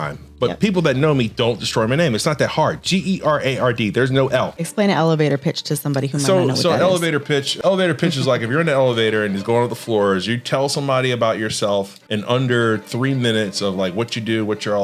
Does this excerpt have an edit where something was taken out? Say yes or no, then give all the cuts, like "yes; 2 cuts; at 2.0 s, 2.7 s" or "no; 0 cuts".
yes; 3 cuts; at 4.6 s, 7.5 s, 12.0 s